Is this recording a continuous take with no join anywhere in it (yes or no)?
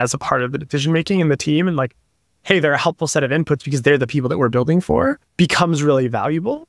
no